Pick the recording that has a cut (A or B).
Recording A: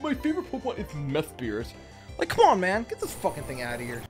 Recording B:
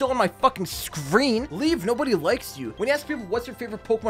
B